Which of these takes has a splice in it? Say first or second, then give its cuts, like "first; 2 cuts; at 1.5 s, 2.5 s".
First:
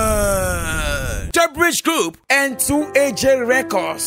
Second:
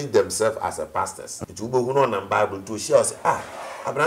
second; 1 cut; at 1.4 s